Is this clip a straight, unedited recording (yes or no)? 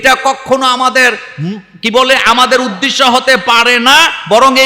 yes